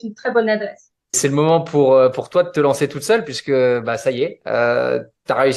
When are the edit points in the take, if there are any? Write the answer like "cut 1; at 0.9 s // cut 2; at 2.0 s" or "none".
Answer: cut 1; at 1.2 s